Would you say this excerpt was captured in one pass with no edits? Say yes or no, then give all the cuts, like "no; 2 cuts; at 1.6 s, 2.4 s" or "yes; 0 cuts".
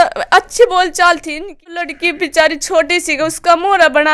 no; 1 cut; at 1.8 s